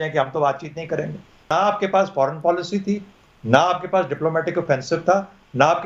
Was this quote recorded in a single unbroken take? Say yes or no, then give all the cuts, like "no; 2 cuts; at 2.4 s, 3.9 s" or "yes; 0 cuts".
no; 1 cut; at 1.5 s